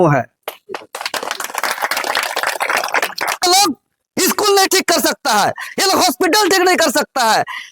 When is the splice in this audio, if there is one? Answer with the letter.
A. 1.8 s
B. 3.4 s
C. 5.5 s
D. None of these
B